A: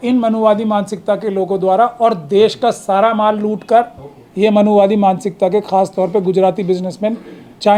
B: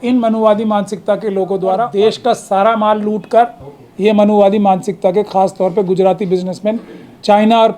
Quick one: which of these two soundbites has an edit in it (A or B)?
B